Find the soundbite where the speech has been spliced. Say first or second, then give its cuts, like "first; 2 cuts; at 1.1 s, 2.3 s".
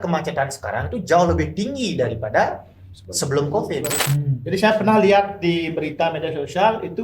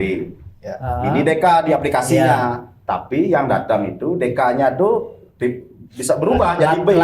first; 1 cut; at 4.0 s